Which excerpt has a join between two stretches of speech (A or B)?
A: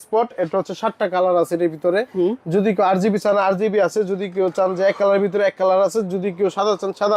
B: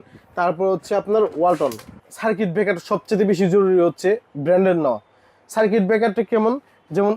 B